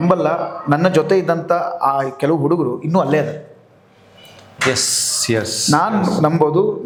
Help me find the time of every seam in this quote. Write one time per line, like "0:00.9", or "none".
none